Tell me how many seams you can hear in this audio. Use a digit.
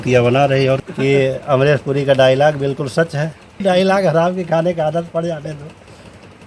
2